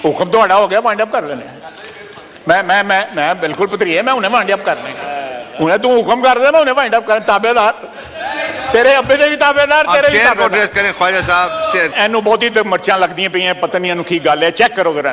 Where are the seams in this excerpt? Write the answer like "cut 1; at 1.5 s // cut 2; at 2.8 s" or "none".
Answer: cut 1; at 11.9 s